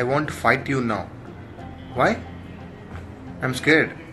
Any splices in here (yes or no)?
no